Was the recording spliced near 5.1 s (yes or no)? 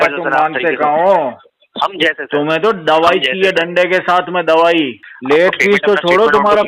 yes